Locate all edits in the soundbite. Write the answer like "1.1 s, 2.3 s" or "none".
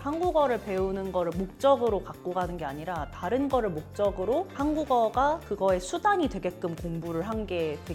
none